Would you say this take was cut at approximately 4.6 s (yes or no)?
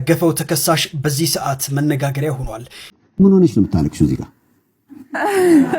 no